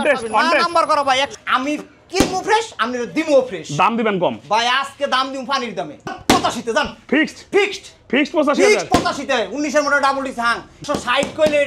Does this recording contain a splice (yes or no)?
yes